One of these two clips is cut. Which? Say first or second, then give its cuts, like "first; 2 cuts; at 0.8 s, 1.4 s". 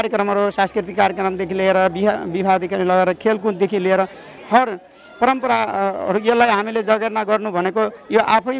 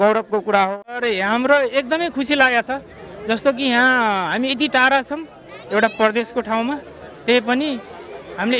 second; 1 cut; at 1.0 s